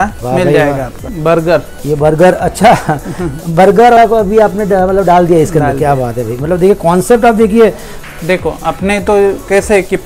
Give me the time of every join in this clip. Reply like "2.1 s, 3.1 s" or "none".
1.1 s, 4.0 s, 7.9 s